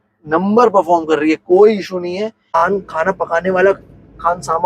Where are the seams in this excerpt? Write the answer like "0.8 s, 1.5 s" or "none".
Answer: 2.5 s